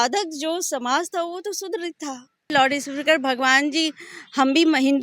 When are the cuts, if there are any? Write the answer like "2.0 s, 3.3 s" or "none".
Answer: 2.5 s